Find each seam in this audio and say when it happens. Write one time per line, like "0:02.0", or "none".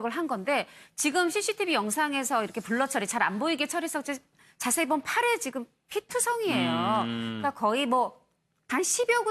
0:06.4